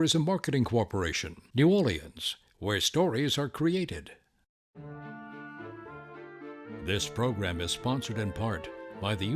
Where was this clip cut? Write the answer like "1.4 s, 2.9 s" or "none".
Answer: 4.5 s